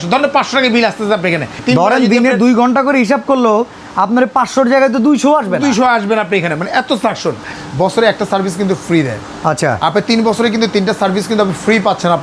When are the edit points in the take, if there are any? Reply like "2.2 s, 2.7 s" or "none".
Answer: 1.5 s, 7.6 s